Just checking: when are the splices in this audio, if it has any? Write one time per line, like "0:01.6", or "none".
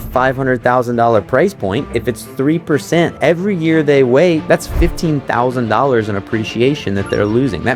0:01.9
0:03.1
0:04.4